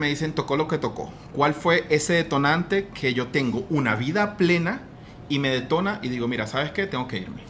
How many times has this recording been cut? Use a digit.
0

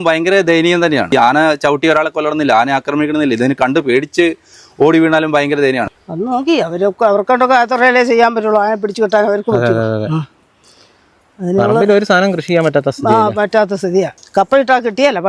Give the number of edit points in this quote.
3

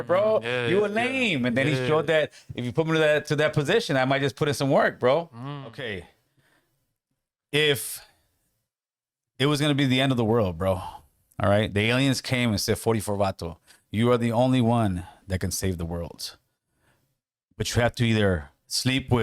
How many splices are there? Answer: 1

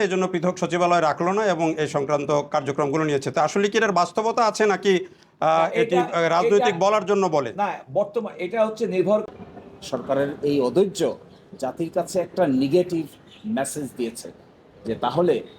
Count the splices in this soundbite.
1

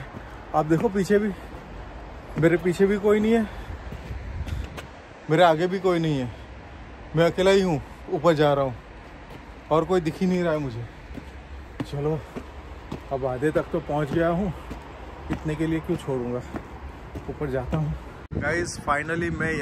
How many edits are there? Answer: 0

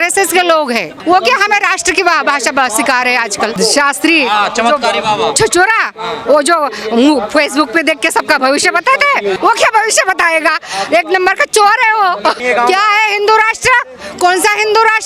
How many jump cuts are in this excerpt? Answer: 3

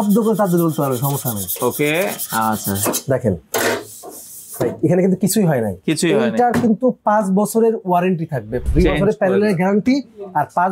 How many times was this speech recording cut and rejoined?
1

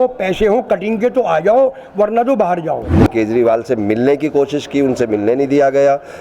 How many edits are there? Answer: 1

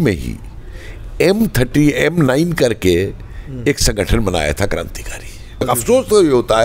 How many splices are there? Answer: 1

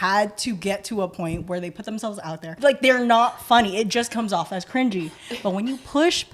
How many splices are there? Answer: 1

